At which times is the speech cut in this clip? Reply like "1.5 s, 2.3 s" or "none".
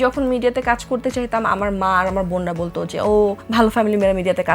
3.4 s